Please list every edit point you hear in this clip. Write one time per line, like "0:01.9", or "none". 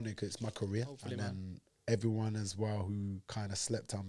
0:01.0